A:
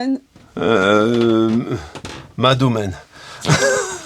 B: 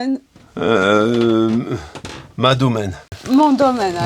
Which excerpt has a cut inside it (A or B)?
B